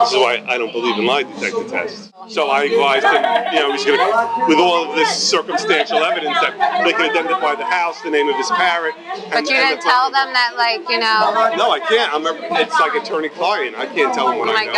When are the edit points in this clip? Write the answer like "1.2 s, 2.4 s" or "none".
2.3 s